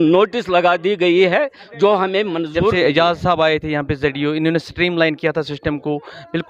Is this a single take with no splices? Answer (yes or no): no